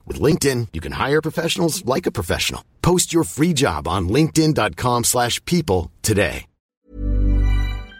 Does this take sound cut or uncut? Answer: cut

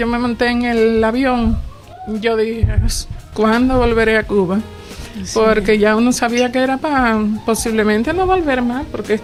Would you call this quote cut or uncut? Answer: uncut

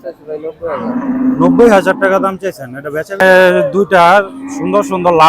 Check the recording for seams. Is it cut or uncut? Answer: cut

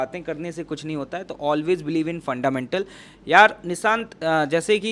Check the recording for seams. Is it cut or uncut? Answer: uncut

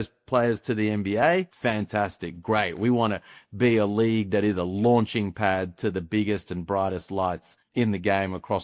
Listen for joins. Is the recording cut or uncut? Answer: cut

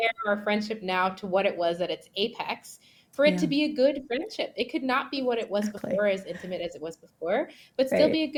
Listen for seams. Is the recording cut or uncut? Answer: uncut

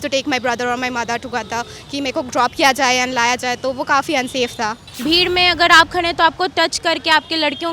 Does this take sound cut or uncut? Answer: cut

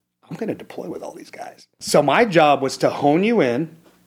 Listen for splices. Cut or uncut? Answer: cut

